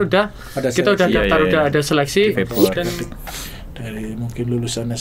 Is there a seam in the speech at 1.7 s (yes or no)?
no